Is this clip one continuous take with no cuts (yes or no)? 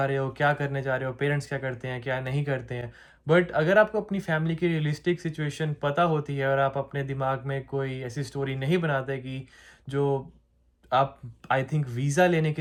yes